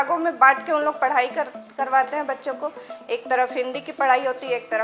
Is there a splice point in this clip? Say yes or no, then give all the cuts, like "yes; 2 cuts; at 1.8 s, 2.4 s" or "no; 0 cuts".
no; 0 cuts